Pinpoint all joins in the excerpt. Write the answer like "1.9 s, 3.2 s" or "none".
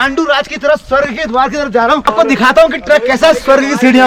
2.0 s